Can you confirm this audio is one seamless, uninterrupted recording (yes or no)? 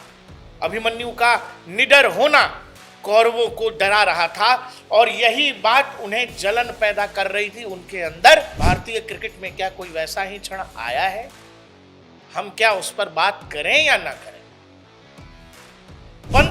no